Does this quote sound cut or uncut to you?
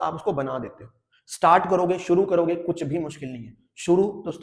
uncut